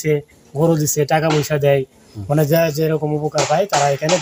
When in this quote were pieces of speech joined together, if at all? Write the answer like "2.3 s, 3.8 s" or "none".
none